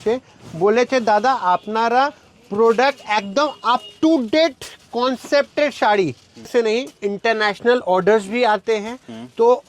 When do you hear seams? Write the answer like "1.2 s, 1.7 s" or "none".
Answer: 6.5 s